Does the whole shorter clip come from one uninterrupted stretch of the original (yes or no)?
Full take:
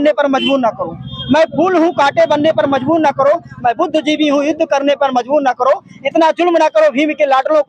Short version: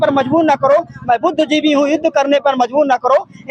yes